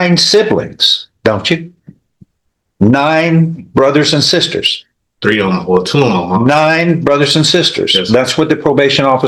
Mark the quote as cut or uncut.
uncut